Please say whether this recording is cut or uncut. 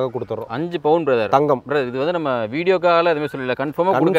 uncut